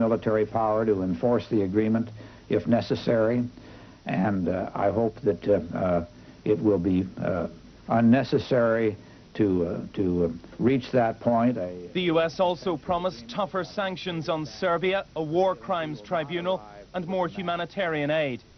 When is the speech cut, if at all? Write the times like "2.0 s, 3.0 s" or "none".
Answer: 8.2 s